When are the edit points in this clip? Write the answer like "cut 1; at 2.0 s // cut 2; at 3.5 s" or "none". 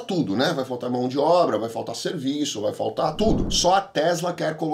cut 1; at 3.5 s